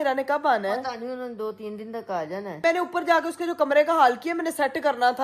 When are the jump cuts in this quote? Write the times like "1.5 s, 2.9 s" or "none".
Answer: 2.6 s